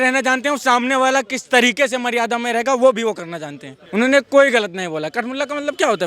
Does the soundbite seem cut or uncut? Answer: cut